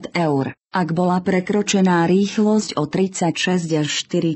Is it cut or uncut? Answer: cut